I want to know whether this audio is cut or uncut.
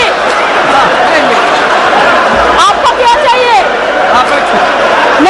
uncut